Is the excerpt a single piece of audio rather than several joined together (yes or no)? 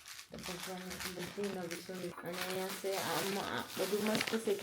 no